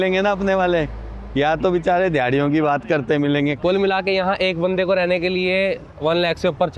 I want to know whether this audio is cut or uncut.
cut